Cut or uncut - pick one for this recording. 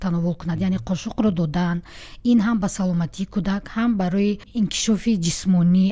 cut